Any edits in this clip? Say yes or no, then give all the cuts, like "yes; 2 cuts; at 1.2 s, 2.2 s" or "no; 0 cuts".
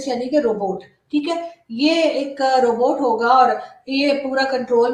no; 0 cuts